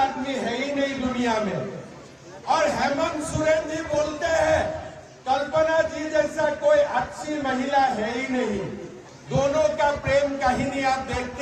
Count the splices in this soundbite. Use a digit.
0